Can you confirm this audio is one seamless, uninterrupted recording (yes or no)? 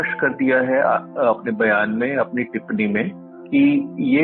yes